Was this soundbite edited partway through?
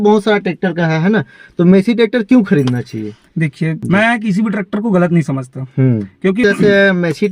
yes; 2 cuts; at 3.8 s, 6.4 s

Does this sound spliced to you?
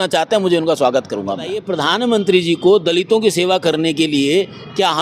yes; 1 cut; at 1.7 s

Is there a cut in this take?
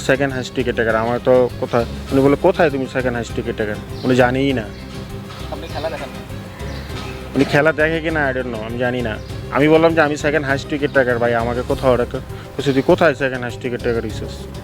no; 0 cuts

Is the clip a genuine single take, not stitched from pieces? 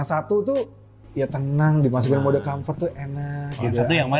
no; 1 cut; at 1.0 s

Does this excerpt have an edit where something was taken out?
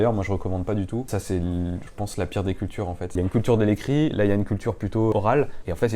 yes; 3 cuts; at 1.1 s, 3.2 s, 5.2 s

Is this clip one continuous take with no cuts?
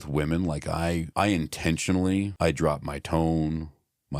no; 2 cuts; at 1.1 s, 2.3 s

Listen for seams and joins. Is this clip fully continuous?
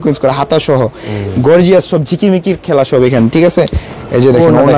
yes; 0 cuts

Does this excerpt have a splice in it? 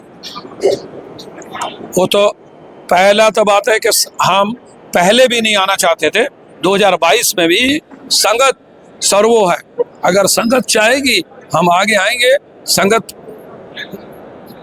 yes; 1 cut; at 7.7 s

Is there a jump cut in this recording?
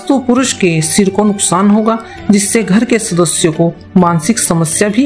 no; 0 cuts

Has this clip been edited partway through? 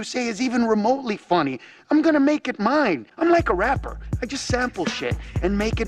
yes; 1 cut; at 3.1 s

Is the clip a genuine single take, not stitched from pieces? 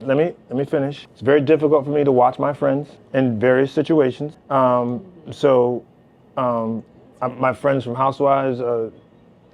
no; 3 cuts; at 1.0 s, 3.0 s, 4.3 s

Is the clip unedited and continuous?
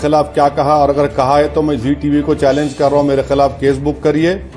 yes; 0 cuts

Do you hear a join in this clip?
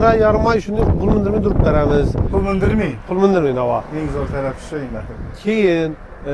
no; 0 cuts

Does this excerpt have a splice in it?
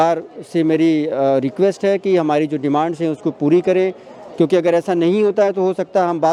no; 0 cuts

